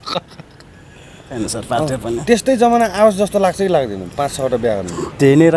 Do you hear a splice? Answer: yes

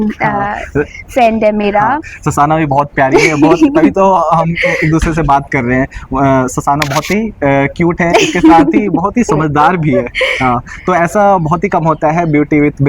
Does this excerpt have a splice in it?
no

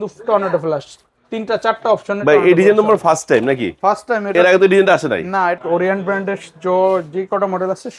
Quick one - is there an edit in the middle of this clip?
yes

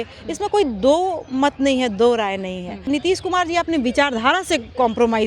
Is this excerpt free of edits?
no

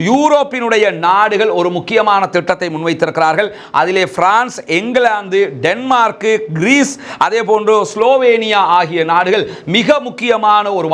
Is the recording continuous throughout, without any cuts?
yes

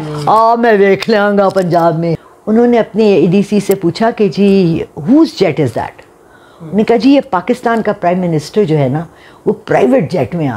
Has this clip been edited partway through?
yes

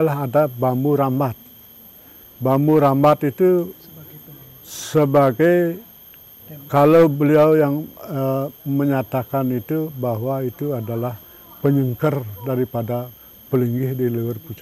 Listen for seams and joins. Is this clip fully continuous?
yes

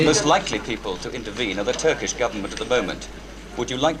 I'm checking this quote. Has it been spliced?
no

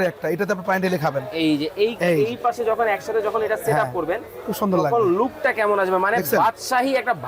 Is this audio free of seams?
yes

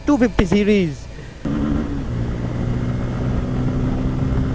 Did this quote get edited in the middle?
yes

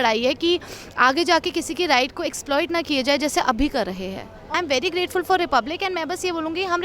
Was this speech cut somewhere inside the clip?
yes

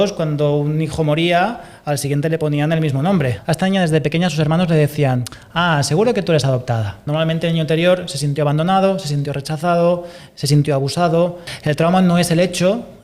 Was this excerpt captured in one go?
no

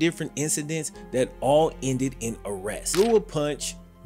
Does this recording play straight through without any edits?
no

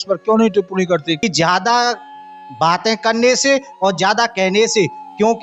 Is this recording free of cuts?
no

